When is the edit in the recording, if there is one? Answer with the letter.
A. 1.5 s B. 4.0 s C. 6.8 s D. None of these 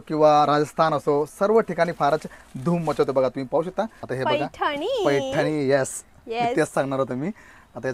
B